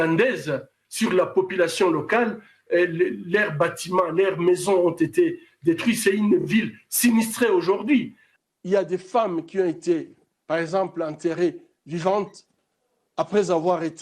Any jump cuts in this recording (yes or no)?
yes